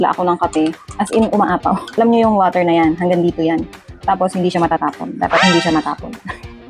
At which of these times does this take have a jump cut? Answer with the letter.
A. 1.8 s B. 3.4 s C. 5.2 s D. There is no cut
A